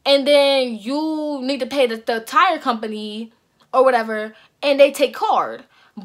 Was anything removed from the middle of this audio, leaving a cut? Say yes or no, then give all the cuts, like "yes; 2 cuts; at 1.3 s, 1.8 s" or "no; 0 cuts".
no; 0 cuts